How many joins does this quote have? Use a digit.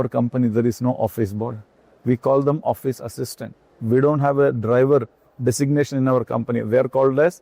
0